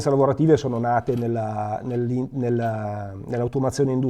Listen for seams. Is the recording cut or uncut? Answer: uncut